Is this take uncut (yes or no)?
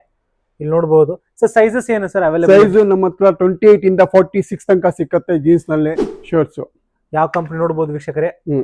no